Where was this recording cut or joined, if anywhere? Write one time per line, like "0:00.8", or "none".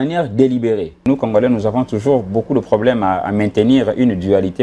0:01.0